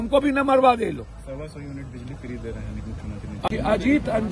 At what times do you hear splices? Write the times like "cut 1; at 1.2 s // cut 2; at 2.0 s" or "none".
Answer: none

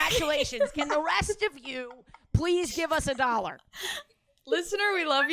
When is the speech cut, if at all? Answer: none

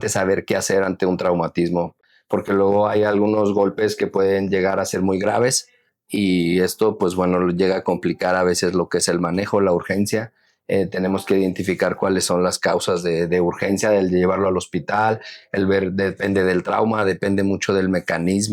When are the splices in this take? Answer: none

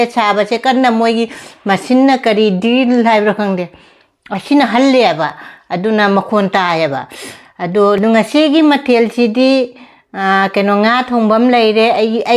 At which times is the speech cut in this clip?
cut 1; at 8.0 s

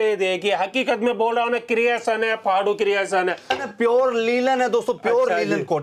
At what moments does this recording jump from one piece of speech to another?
cut 1; at 3.6 s

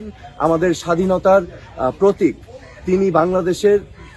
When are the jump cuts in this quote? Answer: none

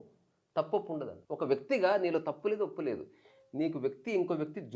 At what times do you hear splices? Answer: cut 1; at 1.2 s

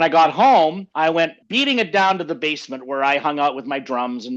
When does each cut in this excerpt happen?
cut 1; at 1.1 s

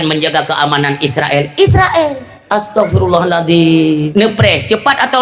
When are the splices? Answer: cut 1; at 2.3 s // cut 2; at 4.1 s

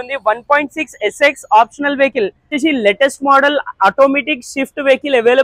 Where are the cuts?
cut 1; at 2.4 s

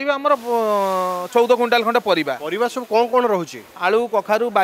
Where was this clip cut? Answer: none

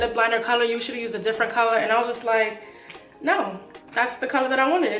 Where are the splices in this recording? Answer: none

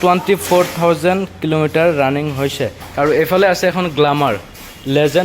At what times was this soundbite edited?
cut 1; at 2.8 s

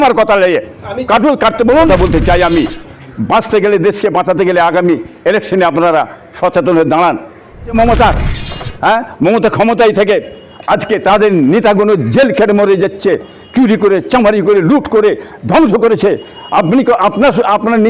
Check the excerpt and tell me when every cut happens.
cut 1; at 1.9 s // cut 2; at 7.7 s

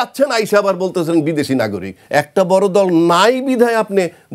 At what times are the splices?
cut 1; at 1.9 s

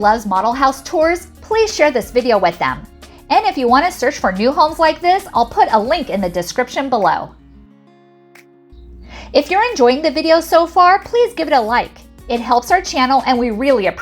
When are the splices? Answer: none

